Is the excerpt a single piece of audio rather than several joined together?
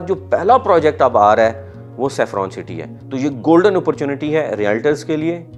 yes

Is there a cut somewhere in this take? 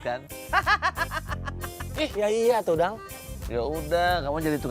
yes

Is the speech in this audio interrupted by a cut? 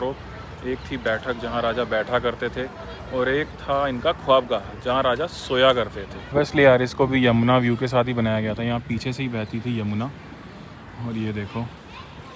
no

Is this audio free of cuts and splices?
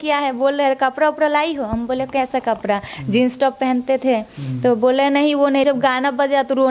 no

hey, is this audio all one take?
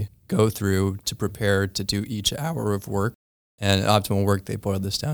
no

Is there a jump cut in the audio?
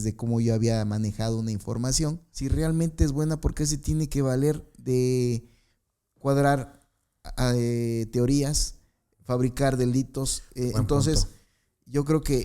yes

